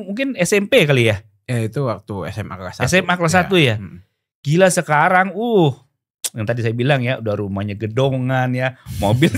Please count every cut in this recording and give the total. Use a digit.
0